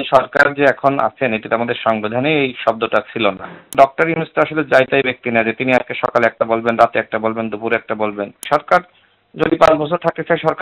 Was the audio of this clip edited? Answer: yes; 2 cuts; at 3.7 s, 8.4 s

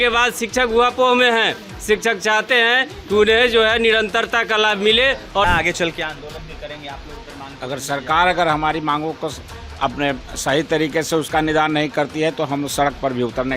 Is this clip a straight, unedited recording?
no; 1 cut; at 5.4 s

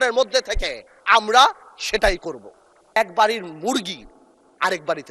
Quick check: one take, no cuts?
no; 1 cut; at 3.0 s

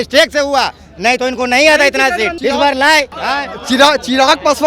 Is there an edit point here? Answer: yes; 2 cuts; at 2.3 s, 3.2 s

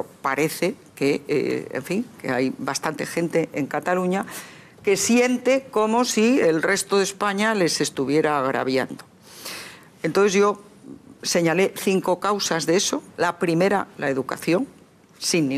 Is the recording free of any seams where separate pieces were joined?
yes; 0 cuts

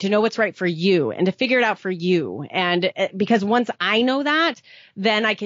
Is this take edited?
no; 0 cuts

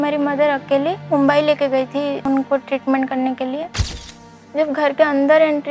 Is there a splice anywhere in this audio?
yes; 3 cuts; at 1.0 s, 2.2 s, 4.1 s

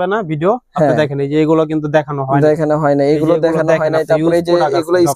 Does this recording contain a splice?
no; 0 cuts

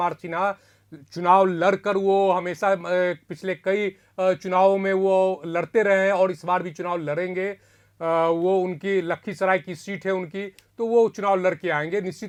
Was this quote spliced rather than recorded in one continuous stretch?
no; 0 cuts

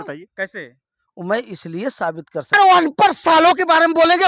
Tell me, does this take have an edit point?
yes; 1 cut; at 2.5 s

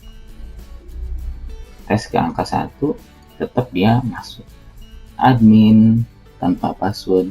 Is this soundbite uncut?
no; 1 cut; at 5.1 s

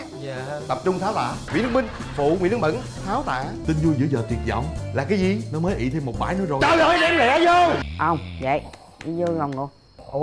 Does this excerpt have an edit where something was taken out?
yes; 3 cuts; at 1.5 s, 3.6 s, 7.8 s

